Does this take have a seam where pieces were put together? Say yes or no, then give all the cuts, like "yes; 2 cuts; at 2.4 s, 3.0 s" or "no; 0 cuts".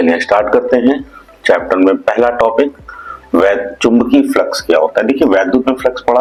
no; 0 cuts